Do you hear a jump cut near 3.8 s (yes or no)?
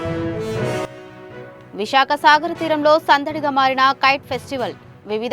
no